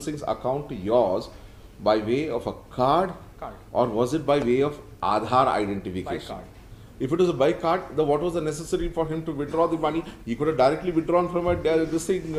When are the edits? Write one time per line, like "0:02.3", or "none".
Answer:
none